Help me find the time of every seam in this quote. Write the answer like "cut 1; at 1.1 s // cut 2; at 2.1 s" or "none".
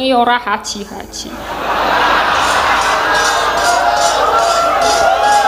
none